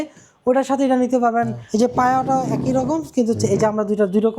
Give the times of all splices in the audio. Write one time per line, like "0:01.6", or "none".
0:01.6

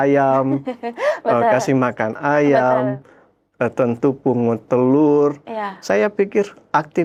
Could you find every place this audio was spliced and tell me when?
none

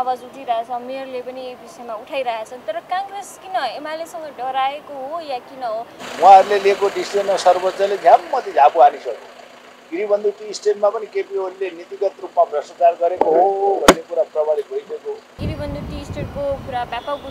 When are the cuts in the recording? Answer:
0:05.9
0:15.4

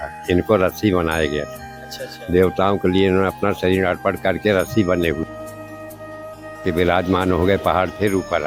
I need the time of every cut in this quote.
none

